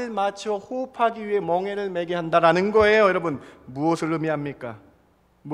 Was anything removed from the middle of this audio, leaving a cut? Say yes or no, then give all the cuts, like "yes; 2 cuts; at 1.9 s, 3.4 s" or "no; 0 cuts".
no; 0 cuts